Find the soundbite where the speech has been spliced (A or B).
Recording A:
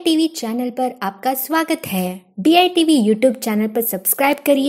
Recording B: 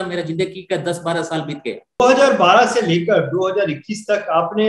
B